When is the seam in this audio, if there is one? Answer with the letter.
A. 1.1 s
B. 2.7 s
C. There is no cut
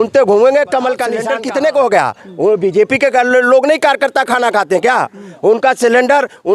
A